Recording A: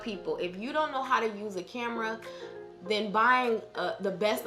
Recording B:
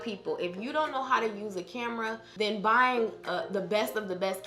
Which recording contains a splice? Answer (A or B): B